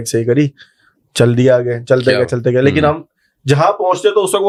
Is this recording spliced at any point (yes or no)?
no